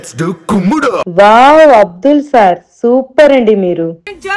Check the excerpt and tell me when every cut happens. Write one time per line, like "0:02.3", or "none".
0:01.0

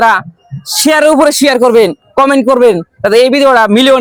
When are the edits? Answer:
none

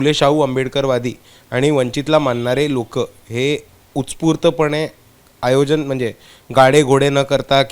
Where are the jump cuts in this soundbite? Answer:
none

